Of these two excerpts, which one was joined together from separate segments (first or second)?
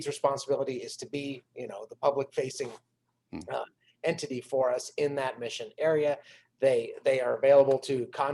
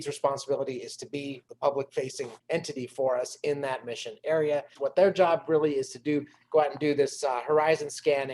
second